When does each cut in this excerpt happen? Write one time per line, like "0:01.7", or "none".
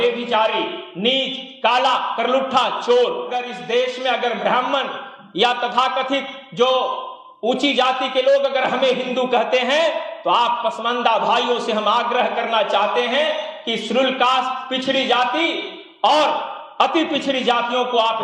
0:03.3